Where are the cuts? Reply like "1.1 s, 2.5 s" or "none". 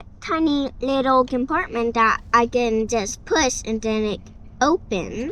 none